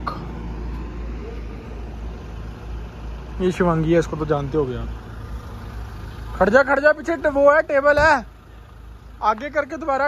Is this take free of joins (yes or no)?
yes